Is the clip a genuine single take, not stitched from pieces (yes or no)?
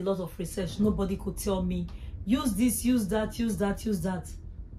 yes